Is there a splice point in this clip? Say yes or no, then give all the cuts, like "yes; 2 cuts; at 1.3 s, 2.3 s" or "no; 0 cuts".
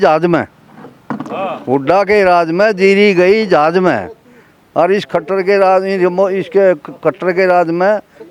no; 0 cuts